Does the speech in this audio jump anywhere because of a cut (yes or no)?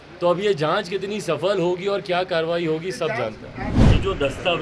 yes